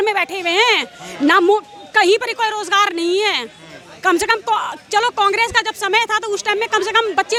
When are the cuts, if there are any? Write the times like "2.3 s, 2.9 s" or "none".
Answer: none